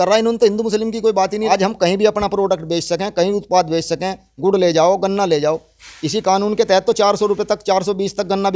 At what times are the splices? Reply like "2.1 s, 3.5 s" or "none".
1.5 s

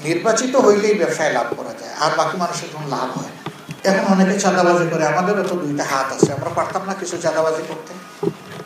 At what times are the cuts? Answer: 3.7 s

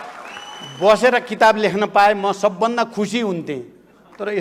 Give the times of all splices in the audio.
none

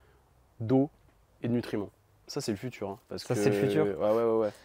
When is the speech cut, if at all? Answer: 2.2 s

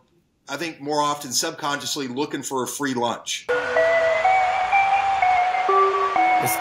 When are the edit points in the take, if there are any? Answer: 3.3 s

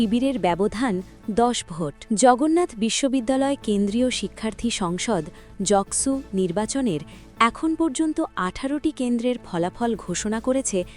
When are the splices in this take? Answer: 2.0 s

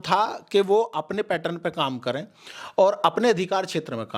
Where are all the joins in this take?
none

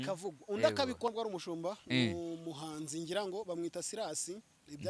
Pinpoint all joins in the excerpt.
1.1 s

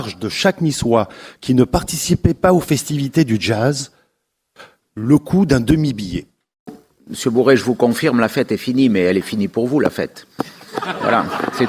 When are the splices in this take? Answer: 6.8 s

